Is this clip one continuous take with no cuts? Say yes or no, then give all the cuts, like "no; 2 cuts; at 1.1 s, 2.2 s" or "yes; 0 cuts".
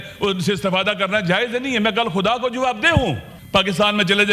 no; 1 cut; at 3.3 s